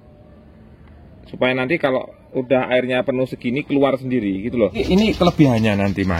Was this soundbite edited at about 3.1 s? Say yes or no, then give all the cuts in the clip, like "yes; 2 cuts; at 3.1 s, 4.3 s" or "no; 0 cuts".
no; 1 cut; at 4.8 s